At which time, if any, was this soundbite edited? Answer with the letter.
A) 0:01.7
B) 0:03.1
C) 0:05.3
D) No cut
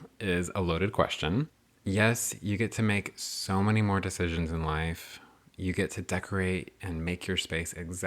A